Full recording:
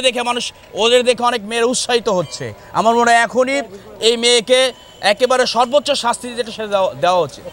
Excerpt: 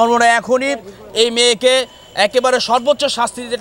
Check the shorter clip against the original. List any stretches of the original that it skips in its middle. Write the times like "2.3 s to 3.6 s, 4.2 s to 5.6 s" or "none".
none